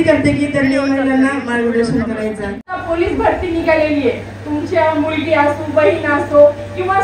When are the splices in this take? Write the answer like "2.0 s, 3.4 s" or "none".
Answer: 2.8 s